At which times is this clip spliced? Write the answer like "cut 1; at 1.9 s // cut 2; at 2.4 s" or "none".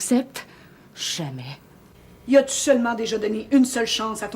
cut 1; at 1.8 s